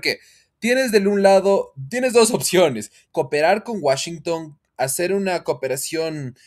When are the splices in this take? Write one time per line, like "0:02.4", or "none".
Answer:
0:03.0